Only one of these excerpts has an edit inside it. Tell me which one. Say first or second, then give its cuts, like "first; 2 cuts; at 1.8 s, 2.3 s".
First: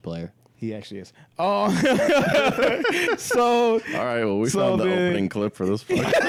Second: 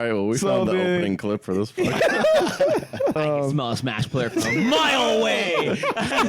second; 1 cut; at 3.2 s